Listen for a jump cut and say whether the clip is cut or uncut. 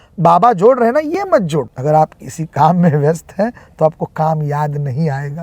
cut